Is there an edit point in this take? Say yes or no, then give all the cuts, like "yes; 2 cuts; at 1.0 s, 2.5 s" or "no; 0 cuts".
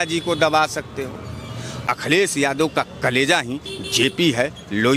yes; 1 cut; at 1.9 s